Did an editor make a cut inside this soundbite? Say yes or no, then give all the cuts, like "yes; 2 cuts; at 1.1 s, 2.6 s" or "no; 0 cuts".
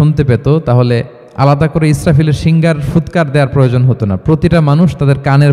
yes; 1 cut; at 1.2 s